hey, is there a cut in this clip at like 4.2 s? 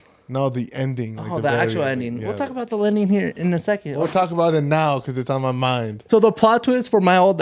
no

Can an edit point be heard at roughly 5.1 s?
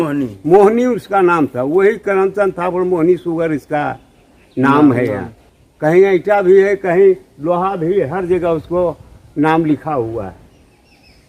no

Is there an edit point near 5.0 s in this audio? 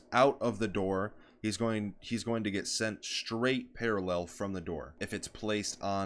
yes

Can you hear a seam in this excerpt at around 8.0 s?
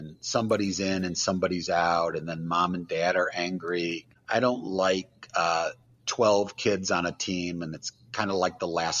no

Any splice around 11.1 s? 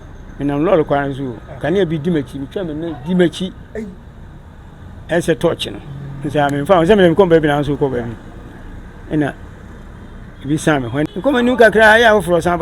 yes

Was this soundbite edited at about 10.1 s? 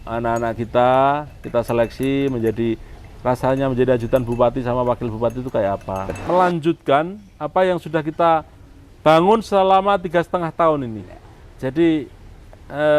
no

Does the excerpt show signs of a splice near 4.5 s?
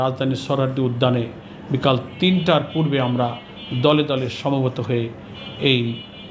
no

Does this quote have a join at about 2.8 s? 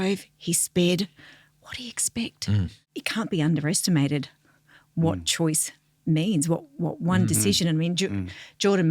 yes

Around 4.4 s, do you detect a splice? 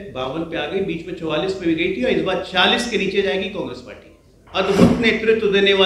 yes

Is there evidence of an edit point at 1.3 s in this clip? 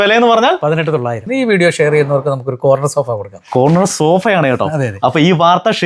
yes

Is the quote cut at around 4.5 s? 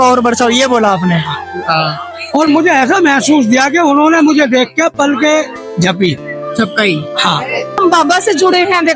no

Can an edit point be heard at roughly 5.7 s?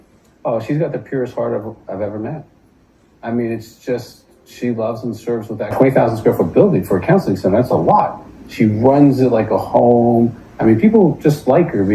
yes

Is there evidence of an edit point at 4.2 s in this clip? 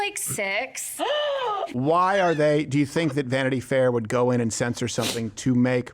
no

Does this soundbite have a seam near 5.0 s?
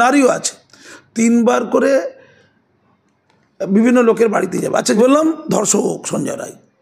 yes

